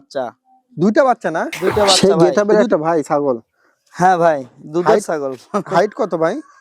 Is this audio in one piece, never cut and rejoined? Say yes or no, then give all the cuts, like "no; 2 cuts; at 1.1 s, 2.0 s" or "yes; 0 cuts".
no; 1 cut; at 2.0 s